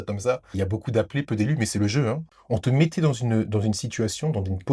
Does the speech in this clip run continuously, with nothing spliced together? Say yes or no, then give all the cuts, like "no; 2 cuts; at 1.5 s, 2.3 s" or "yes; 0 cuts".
no; 1 cut; at 2.3 s